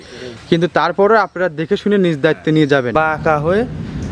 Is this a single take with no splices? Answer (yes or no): no